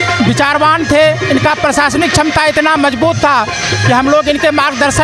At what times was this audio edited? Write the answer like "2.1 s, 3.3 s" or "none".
none